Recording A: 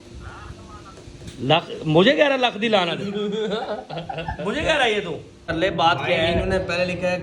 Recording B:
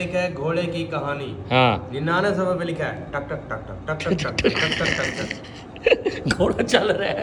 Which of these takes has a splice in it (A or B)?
A